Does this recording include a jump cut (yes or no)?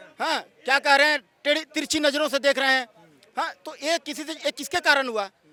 no